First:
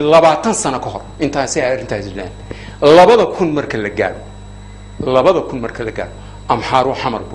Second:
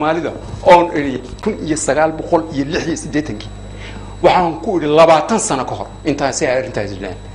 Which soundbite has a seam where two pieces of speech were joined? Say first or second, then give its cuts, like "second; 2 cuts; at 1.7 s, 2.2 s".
second; 1 cut; at 1.3 s